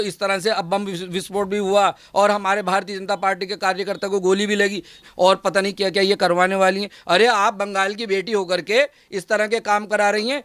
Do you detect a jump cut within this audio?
yes; 1 cut; at 5.0 s

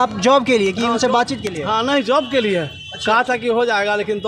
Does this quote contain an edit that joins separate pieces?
no; 0 cuts

